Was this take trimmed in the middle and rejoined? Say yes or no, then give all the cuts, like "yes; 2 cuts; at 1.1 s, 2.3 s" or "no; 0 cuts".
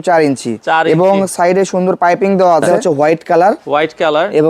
yes; 1 cut; at 2.8 s